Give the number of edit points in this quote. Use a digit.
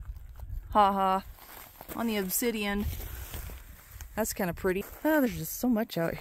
1